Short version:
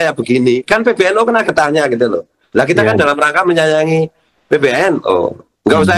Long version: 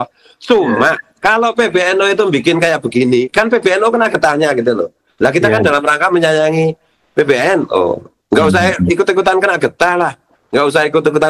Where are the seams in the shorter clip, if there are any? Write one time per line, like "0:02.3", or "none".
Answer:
none